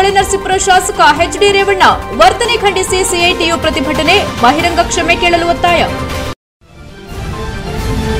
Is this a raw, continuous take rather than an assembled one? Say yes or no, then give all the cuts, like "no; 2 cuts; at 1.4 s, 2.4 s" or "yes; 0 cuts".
no; 1 cut; at 6.0 s